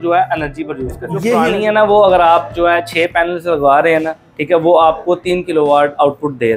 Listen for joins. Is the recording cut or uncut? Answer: cut